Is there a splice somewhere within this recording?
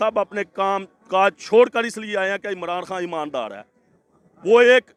no; 0 cuts

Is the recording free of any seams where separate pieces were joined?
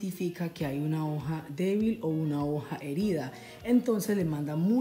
yes; 0 cuts

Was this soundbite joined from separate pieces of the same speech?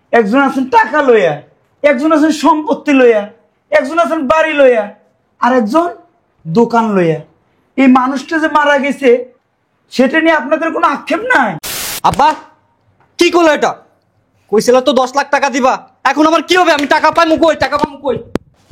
yes; 1 cut; at 11.6 s

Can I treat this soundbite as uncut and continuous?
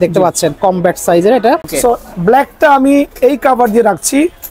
no; 1 cut; at 1.7 s

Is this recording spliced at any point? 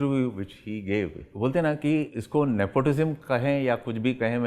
yes; 2 cuts; at 1.2 s, 2.2 s

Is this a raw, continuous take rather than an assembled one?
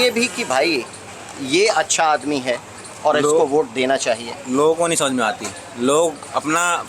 yes; 0 cuts

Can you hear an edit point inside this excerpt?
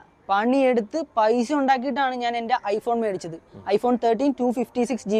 no; 0 cuts

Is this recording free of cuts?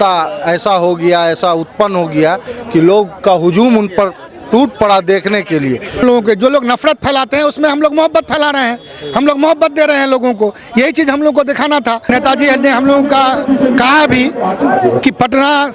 no; 2 cuts; at 6.0 s, 12.1 s

